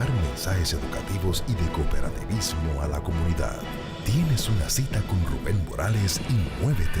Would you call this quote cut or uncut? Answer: uncut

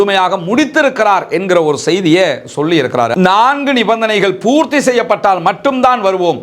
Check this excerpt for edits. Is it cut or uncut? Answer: cut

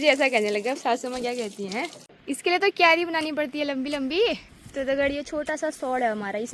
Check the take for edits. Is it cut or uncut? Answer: cut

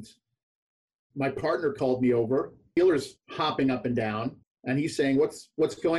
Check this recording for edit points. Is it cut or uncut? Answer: cut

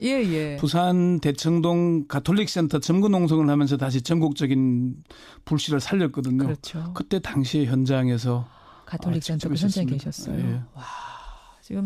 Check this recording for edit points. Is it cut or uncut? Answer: cut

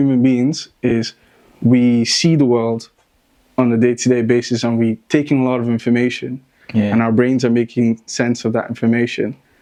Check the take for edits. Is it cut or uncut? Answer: uncut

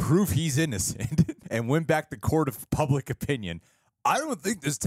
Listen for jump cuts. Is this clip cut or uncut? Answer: cut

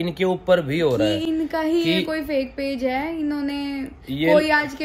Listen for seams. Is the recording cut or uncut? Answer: uncut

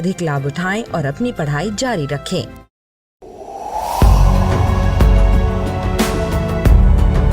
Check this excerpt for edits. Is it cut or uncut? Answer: cut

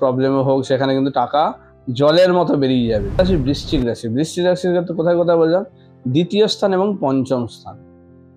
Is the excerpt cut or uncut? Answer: cut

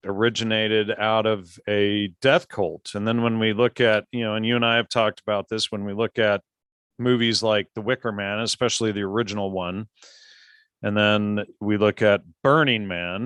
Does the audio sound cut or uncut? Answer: uncut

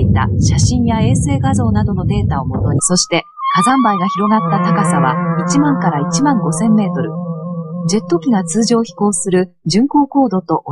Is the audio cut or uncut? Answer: uncut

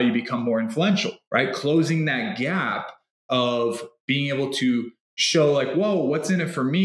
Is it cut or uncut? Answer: cut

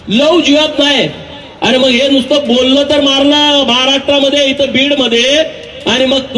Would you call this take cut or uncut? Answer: uncut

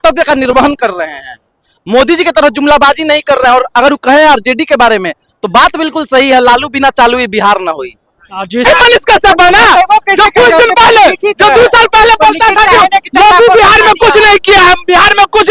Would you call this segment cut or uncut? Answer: cut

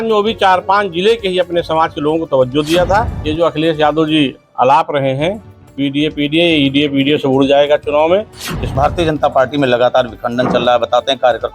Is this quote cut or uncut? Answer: cut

